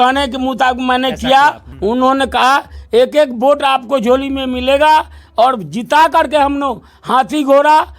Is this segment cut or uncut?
cut